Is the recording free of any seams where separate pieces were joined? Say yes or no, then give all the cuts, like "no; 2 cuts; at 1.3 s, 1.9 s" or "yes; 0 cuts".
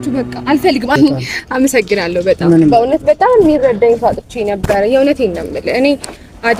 no; 1 cut; at 1.0 s